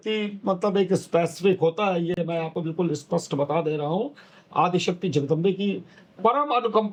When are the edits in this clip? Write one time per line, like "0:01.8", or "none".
none